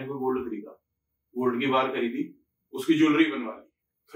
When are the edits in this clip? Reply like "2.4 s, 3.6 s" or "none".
none